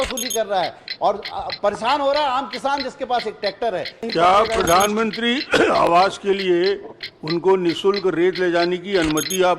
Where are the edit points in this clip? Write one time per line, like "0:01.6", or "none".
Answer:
0:04.1